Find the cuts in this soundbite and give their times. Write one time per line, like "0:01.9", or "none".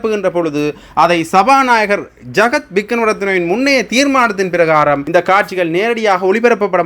0:05.0

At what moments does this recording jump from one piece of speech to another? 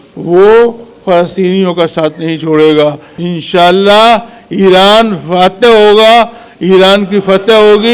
0:03.1

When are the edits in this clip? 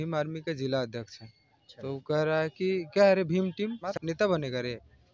0:03.9

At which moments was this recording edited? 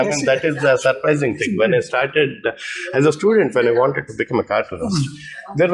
none

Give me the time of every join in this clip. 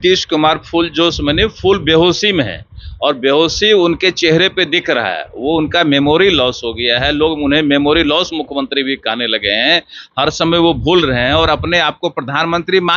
none

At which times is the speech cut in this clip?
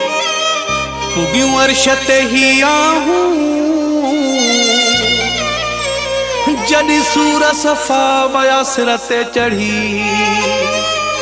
none

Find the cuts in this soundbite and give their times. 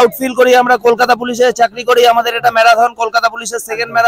none

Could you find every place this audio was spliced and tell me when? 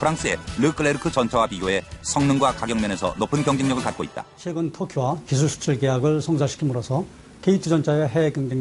0:07.3

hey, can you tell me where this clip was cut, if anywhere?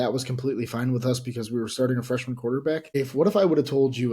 0:03.0

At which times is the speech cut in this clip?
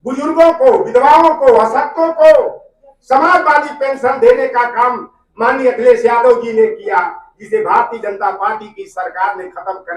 none

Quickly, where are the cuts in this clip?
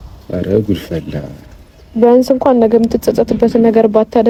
none

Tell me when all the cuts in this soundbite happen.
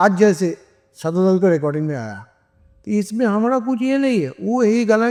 none

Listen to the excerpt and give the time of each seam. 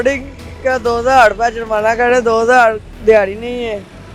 0:02.9

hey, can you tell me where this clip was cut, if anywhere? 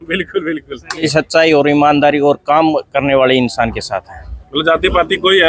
0:01.0

